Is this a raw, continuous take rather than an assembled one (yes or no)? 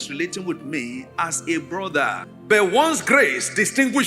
no